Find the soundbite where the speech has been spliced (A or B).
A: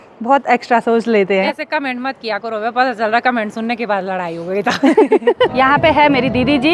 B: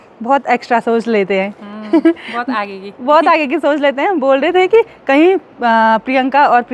A